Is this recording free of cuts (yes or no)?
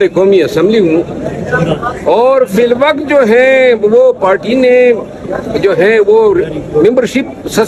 yes